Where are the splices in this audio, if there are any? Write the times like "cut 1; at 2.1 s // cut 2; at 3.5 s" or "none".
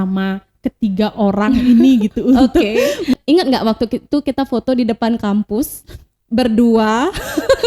cut 1; at 3.1 s